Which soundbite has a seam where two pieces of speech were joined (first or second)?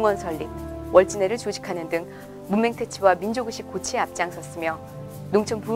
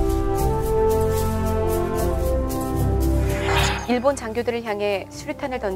second